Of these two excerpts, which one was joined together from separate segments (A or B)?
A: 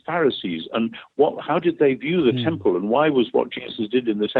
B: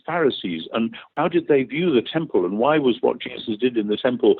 B